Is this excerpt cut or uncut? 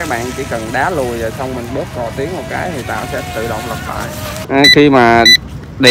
cut